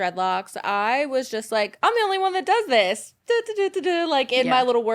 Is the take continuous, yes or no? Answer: yes